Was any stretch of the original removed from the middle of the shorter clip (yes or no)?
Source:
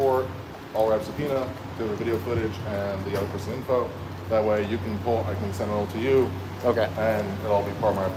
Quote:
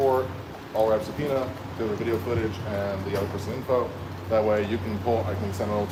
no